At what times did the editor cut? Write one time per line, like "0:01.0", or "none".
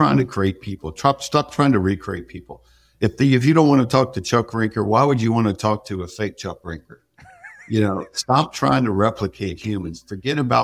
none